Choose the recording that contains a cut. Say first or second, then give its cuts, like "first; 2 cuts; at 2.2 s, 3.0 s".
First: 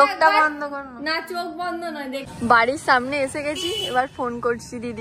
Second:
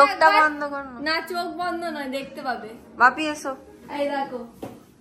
first; 1 cut; at 2.3 s